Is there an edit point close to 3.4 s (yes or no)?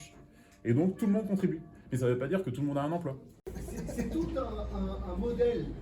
yes